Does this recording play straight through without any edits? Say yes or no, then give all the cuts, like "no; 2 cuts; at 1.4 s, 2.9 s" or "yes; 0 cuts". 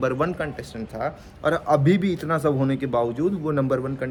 yes; 0 cuts